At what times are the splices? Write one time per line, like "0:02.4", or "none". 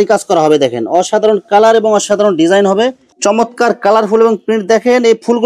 0:03.1